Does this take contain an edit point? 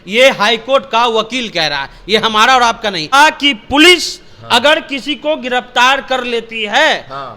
yes; 1 cut; at 3.1 s

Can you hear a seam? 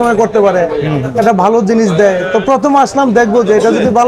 no; 0 cuts

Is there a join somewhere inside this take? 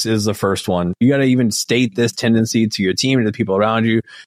yes; 1 cut; at 1.0 s

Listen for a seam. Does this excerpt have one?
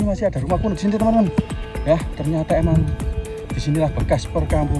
no; 0 cuts

